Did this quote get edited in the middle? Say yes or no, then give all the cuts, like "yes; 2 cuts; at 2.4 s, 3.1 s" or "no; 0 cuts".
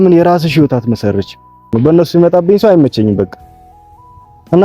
yes; 1 cut; at 1.6 s